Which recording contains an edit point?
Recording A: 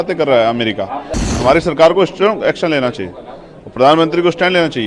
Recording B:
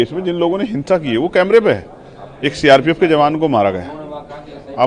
A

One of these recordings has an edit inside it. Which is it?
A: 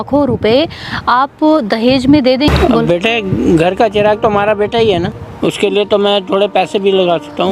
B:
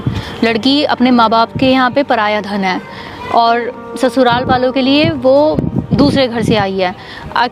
A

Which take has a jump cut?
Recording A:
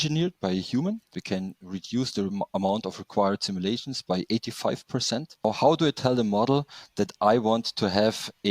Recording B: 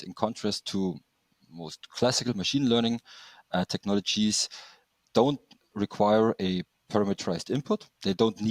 A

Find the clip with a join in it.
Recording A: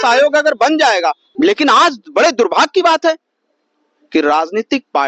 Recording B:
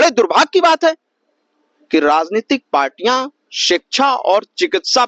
A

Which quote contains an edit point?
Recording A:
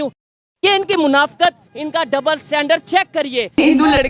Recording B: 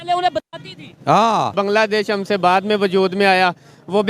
B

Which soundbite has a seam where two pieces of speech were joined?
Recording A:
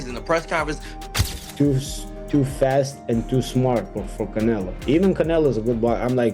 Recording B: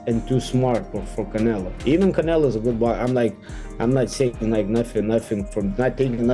A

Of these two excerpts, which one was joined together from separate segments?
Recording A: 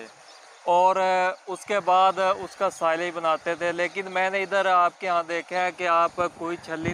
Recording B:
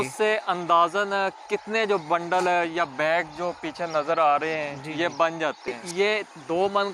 B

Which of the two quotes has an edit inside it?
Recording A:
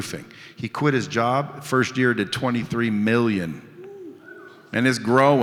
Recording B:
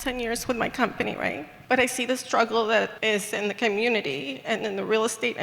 B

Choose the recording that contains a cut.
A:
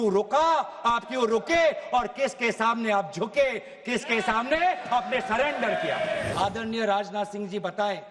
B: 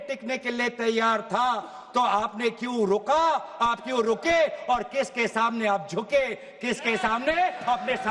A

